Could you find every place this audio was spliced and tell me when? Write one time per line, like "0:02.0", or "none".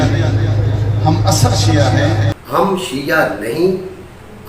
0:02.4